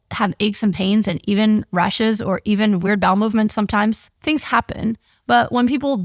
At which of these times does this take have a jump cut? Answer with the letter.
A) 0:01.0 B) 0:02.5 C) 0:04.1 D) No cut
C